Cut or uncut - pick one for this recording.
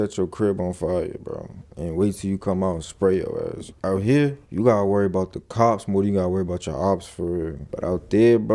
cut